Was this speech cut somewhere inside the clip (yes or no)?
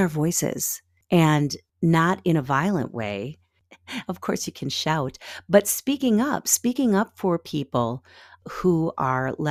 no